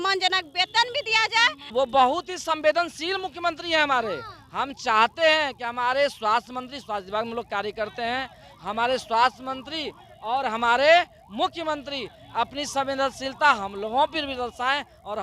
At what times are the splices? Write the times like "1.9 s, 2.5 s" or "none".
1.7 s